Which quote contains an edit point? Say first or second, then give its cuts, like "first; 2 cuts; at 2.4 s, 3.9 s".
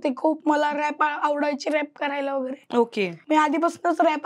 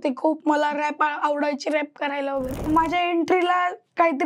second; 1 cut; at 2.6 s